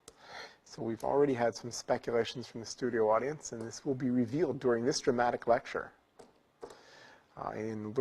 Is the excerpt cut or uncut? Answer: uncut